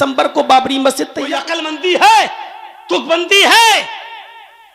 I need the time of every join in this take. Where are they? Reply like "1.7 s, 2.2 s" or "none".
1.5 s